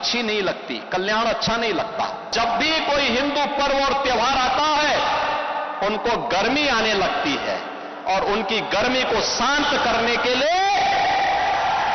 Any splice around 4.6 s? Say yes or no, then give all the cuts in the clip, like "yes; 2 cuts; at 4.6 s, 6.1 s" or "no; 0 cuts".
no; 1 cut; at 2.3 s